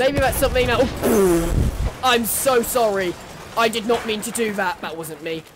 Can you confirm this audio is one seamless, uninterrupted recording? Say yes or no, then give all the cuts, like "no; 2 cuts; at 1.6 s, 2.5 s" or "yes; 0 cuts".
yes; 0 cuts